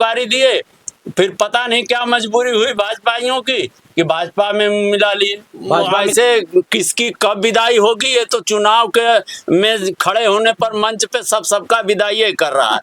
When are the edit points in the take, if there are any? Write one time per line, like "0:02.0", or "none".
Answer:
0:06.0